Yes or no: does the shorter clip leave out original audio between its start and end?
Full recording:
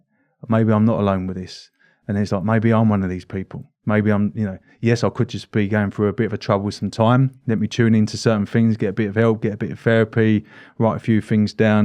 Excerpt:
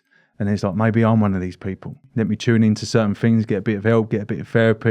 yes